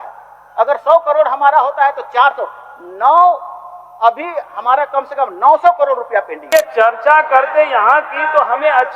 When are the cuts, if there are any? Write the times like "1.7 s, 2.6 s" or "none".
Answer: 6.5 s